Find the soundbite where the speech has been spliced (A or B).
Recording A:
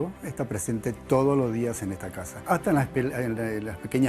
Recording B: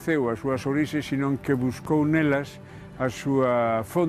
A